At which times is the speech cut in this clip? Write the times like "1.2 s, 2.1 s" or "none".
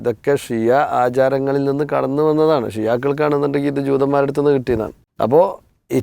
5.0 s

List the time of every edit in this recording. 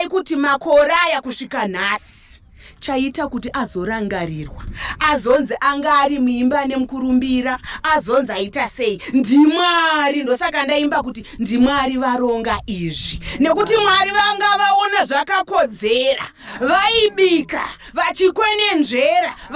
none

